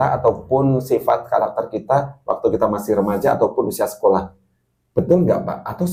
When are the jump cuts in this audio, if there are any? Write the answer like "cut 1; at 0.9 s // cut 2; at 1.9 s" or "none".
none